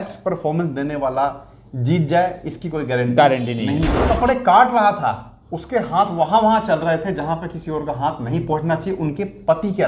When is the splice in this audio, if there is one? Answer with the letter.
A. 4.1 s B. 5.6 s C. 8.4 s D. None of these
A